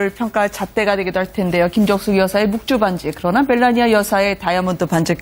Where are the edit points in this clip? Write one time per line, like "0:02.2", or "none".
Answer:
none